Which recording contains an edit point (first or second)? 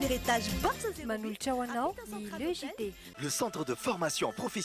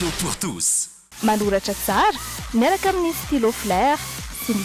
first